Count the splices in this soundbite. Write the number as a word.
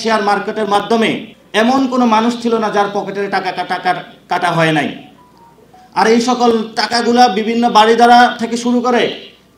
one